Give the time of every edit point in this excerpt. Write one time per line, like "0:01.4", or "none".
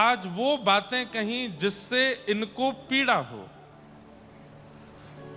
none